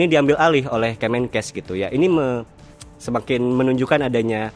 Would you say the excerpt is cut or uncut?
uncut